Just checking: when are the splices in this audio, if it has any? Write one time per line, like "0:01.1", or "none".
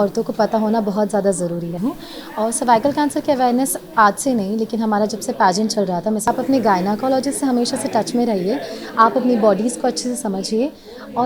0:01.7
0:06.3